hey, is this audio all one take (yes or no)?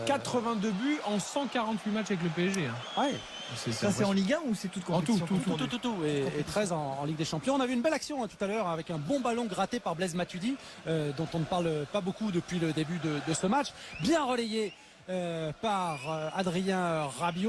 no